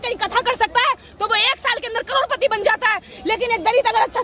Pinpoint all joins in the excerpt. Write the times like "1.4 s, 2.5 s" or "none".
none